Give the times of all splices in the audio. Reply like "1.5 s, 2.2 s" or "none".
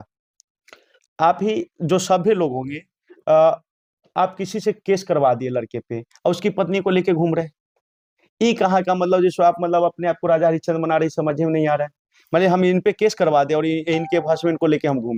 none